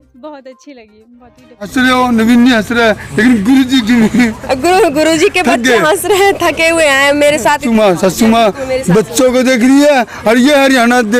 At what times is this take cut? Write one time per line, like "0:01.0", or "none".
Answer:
0:01.7
0:07.6